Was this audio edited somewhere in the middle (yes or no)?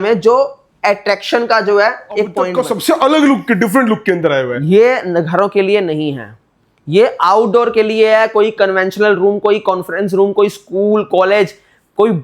yes